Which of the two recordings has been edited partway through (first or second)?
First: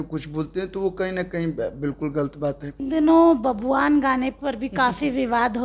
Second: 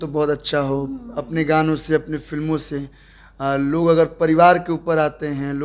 first